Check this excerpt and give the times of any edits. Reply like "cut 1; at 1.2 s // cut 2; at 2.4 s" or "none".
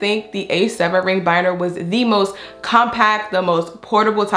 none